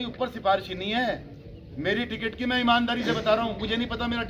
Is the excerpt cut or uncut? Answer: uncut